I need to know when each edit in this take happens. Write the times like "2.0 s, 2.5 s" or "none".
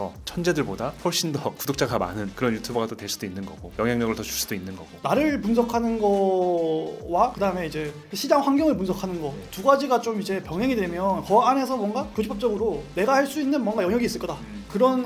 5.0 s